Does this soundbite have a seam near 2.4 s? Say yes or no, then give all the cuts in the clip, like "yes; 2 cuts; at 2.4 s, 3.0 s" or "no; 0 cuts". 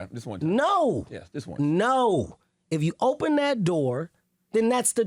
no; 0 cuts